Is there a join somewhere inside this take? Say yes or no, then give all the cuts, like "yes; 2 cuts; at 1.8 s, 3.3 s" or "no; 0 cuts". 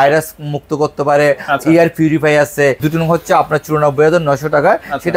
yes; 1 cut; at 2.8 s